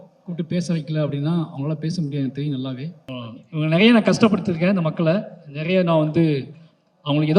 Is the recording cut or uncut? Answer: cut